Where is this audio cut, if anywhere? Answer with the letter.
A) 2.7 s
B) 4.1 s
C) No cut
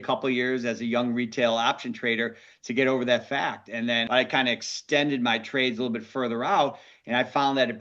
B